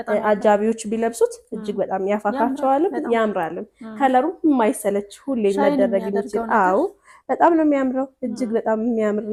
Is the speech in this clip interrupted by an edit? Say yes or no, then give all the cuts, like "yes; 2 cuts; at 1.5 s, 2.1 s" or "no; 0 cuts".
no; 0 cuts